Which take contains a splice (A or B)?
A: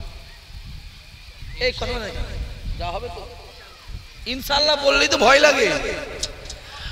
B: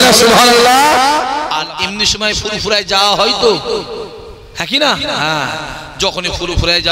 B